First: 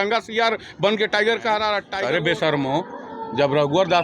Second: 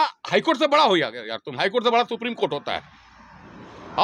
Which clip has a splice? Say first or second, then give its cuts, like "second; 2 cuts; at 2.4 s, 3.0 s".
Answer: first; 1 cut; at 1.9 s